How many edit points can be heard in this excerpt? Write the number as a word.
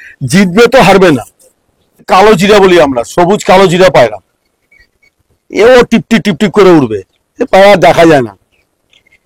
one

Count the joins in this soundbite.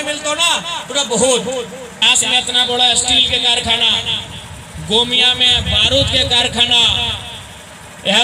one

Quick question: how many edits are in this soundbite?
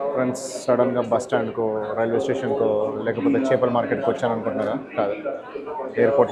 zero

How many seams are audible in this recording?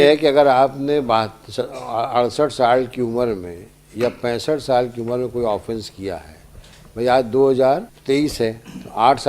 one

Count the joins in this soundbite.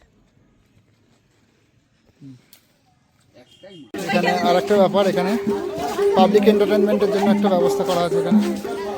one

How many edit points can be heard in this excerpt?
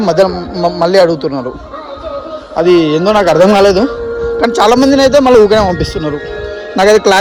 zero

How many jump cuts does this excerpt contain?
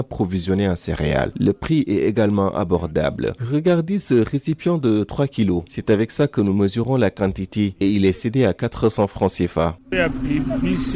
one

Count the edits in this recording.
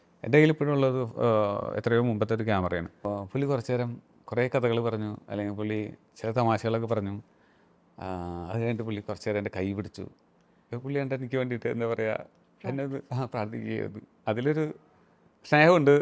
one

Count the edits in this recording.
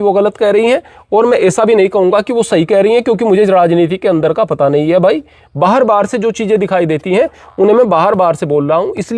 zero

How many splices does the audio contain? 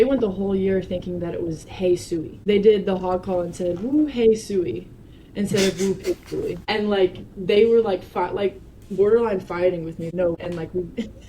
three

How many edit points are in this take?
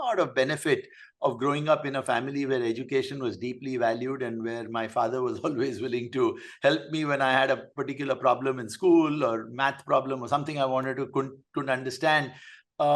zero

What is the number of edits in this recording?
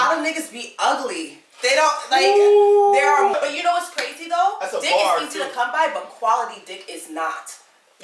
one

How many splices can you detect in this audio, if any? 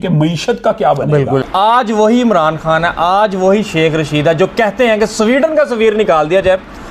one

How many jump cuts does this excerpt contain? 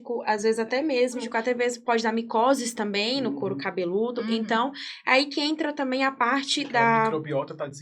one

